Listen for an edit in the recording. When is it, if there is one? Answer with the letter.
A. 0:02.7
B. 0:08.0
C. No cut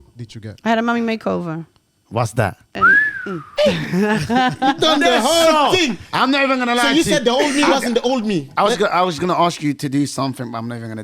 A